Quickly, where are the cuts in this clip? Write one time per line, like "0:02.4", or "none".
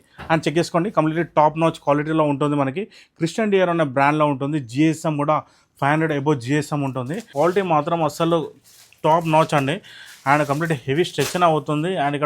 0:07.2